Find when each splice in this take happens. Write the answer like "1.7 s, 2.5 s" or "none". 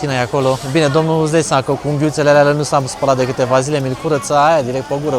none